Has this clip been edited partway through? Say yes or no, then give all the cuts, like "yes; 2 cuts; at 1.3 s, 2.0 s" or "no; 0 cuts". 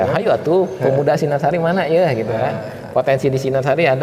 no; 0 cuts